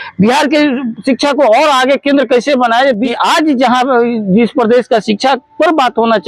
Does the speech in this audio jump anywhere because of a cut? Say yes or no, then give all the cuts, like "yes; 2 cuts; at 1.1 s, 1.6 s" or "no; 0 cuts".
yes; 1 cut; at 3.1 s